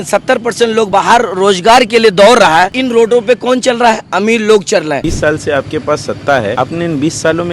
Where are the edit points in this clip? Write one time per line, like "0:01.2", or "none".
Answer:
0:00.9
0:02.8
0:05.1
0:06.5